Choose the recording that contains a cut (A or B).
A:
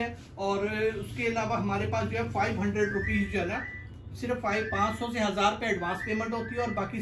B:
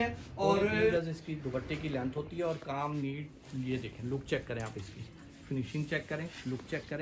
B